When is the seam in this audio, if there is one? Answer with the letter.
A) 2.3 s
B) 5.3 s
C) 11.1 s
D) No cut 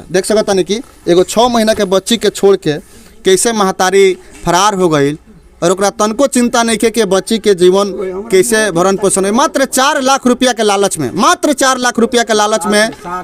D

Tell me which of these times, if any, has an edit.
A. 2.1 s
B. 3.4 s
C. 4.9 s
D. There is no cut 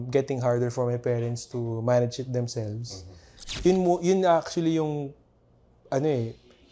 B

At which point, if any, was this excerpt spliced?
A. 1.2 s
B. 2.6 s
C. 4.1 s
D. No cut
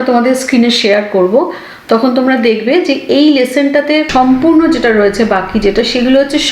C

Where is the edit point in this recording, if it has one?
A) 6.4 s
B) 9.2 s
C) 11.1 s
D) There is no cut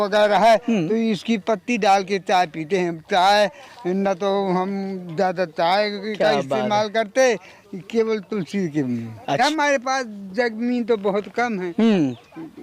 B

